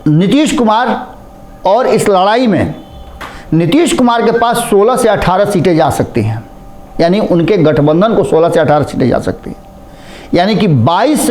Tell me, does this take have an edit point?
no; 0 cuts

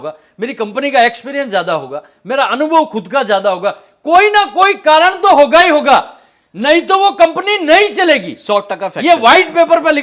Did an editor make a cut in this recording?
no; 0 cuts

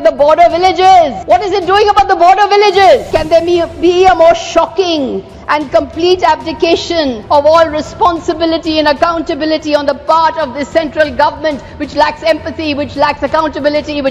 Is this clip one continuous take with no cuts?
no; 3 cuts; at 1.2 s, 3.1 s, 7.2 s

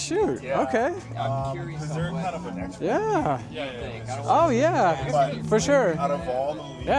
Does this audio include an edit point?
no; 0 cuts

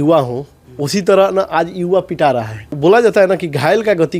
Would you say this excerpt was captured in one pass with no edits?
no; 1 cut; at 2.7 s

